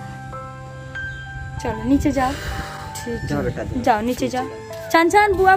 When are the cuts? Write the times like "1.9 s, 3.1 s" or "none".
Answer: none